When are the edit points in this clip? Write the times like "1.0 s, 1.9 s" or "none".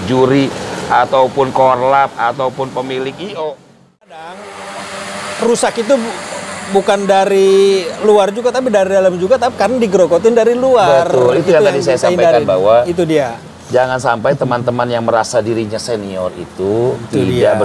4.1 s